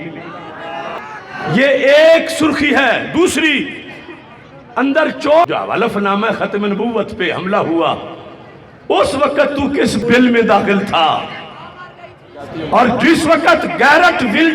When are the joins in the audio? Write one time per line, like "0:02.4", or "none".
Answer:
0:05.5